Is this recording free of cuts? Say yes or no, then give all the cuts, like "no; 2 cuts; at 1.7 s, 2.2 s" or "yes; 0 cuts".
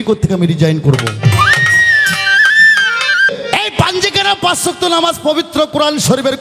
no; 1 cut; at 3.3 s